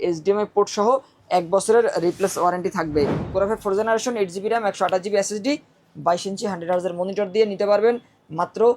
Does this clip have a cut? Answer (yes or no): yes